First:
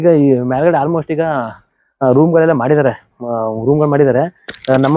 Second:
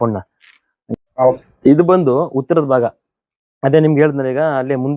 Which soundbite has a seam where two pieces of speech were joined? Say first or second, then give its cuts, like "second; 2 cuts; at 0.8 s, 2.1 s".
second; 1 cut; at 0.9 s